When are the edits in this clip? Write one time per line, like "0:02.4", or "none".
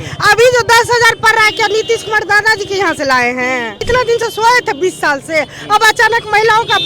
0:03.8